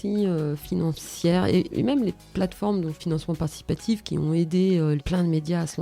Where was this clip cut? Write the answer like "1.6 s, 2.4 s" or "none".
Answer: 1.7 s, 3.0 s, 5.0 s